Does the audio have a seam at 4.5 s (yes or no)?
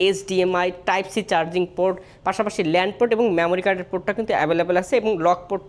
no